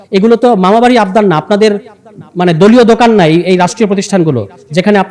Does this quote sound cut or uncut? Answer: uncut